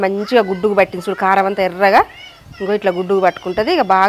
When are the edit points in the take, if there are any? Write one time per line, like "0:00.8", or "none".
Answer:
none

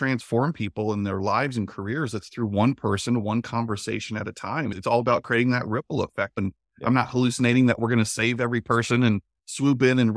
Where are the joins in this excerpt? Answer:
0:04.8
0:06.4

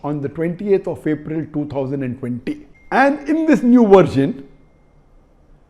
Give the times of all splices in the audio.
0:02.7

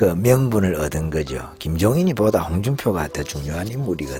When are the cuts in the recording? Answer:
none

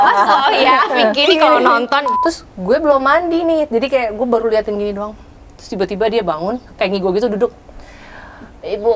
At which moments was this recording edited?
0:01.2
0:02.1

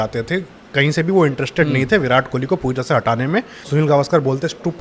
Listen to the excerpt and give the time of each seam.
0:03.6

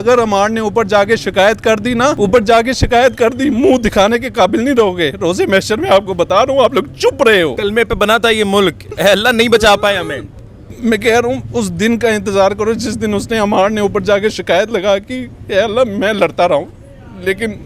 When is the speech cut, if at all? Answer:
0:02.2
0:07.6

